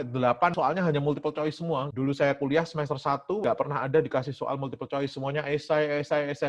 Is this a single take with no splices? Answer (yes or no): yes